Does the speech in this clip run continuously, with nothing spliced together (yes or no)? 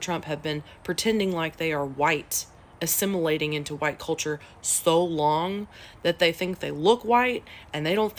yes